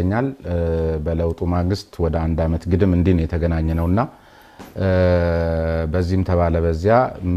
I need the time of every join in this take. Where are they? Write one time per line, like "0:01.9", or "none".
none

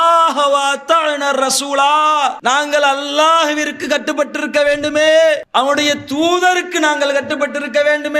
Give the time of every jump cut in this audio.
0:05.4

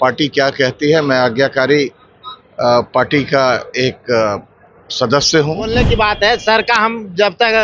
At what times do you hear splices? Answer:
0:05.8

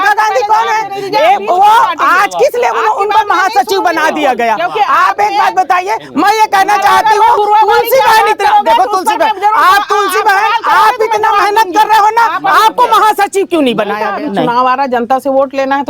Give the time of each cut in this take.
0:14.1

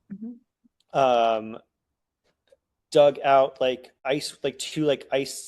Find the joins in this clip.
0:03.9

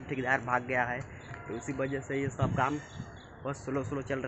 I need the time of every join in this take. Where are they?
none

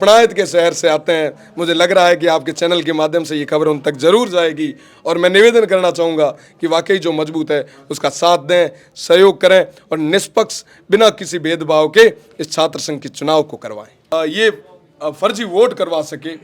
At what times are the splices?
0:14.0

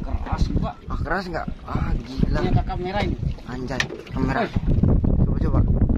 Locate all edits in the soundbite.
none

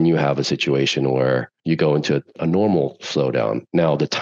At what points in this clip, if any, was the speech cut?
0:01.5
0:02.3

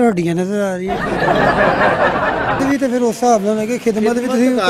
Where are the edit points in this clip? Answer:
0:00.9
0:02.6

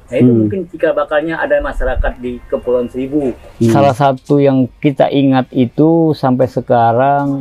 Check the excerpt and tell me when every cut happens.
0:03.8

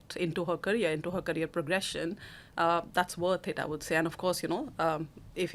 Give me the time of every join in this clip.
none

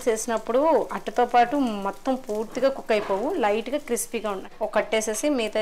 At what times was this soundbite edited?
0:04.4

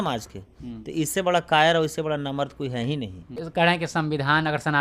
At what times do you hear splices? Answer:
0:03.5

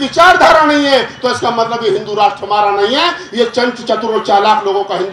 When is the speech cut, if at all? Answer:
0:03.3

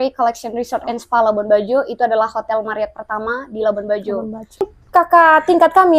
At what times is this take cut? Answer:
0:04.8

